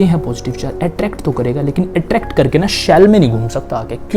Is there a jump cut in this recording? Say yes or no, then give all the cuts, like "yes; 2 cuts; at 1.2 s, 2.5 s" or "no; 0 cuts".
no; 0 cuts